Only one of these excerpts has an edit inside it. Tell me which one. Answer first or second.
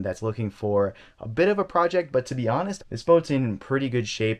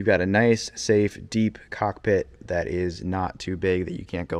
first